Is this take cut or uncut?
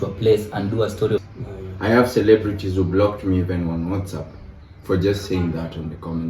cut